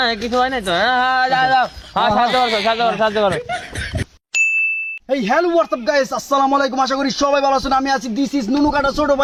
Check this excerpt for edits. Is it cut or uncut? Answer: uncut